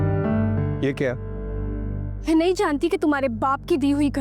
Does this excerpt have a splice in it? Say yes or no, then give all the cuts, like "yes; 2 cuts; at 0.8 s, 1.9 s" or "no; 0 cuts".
yes; 1 cut; at 2.2 s